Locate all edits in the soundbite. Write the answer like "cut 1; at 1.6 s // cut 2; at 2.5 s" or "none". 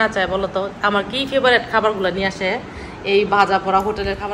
none